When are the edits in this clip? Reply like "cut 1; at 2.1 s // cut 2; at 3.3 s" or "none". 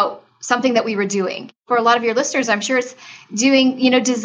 cut 1; at 1.6 s